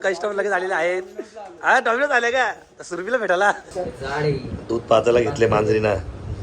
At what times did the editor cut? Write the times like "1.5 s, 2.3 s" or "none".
3.7 s